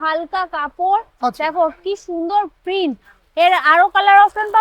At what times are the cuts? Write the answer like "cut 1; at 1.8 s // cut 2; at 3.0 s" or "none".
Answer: none